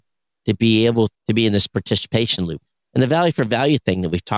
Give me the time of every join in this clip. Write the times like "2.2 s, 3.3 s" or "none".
1.2 s, 2.6 s